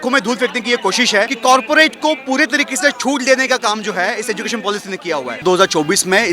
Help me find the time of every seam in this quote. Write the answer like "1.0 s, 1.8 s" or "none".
1.3 s, 5.4 s